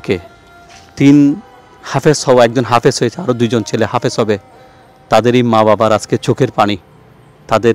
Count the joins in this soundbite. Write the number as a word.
zero